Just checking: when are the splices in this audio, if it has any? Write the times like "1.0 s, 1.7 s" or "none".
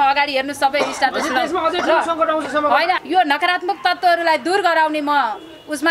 3.0 s